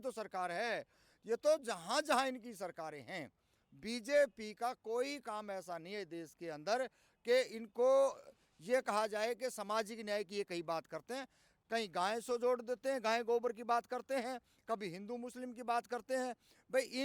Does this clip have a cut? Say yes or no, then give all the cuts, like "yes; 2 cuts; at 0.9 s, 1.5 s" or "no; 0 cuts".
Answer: yes; 1 cut; at 11.6 s